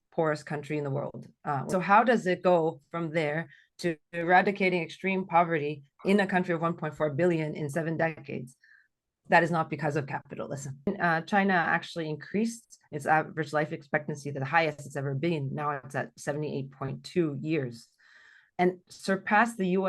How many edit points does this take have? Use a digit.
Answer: 2